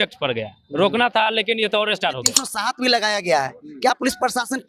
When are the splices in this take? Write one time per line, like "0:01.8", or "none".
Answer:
0:02.5